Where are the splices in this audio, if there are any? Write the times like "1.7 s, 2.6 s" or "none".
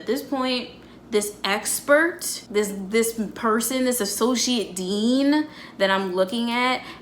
2.3 s